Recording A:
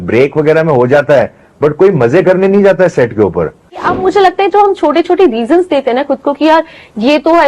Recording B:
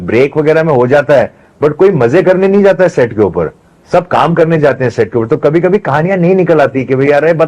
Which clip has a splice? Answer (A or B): A